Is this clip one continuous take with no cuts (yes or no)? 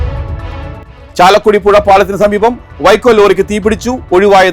no